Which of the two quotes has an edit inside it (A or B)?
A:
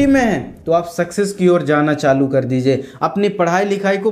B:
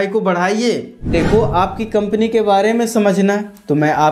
B